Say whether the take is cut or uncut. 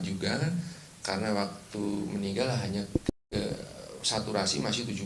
uncut